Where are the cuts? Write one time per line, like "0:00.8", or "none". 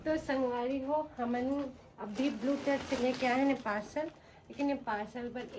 none